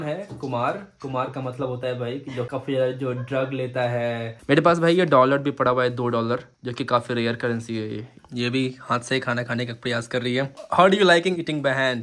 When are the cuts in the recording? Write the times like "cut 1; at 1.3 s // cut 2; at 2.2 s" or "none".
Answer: cut 1; at 2.5 s // cut 2; at 4.3 s // cut 3; at 8.1 s // cut 4; at 10.6 s